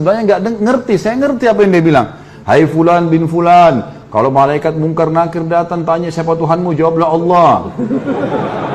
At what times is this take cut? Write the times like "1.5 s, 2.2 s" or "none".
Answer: none

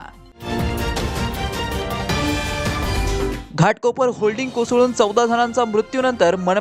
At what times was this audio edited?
none

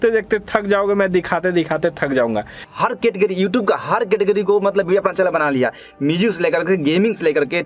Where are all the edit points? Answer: 2.7 s

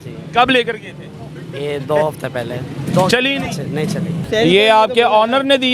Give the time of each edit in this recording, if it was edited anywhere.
4.3 s

